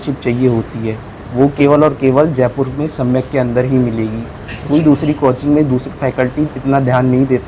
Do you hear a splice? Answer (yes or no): no